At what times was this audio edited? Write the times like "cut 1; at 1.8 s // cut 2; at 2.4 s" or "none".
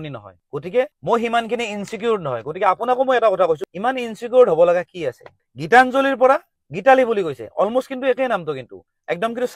cut 1; at 3.7 s